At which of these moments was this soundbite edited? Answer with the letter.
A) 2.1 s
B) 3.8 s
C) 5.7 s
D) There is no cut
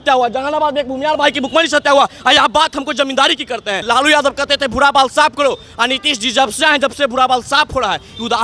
B